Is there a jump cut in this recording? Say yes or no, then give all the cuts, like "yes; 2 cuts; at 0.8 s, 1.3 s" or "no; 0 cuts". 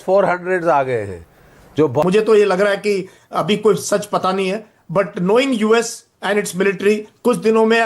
yes; 1 cut; at 2.0 s